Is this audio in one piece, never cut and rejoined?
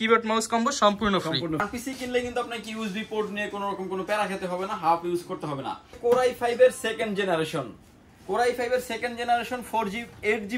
no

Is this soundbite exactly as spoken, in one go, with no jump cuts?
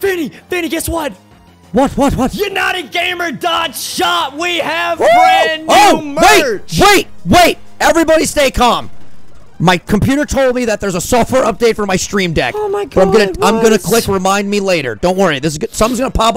yes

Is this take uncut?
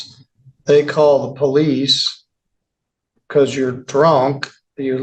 yes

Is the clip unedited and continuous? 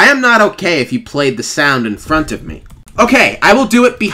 yes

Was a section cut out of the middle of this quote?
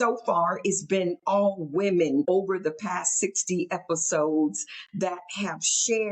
yes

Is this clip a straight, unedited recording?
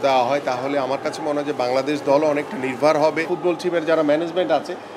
no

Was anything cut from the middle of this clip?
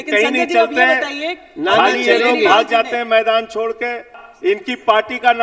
yes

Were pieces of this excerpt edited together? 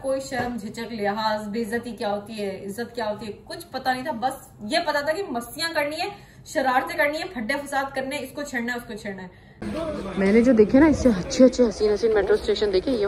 yes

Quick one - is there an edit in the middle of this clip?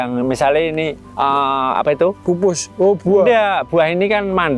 no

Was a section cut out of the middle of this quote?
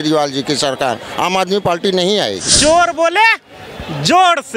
yes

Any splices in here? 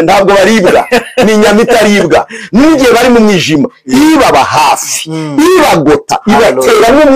no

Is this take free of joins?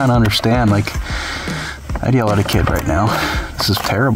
yes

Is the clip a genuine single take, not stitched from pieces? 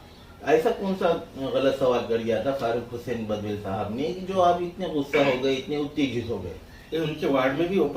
yes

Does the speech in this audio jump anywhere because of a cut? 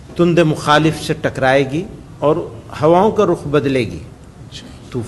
yes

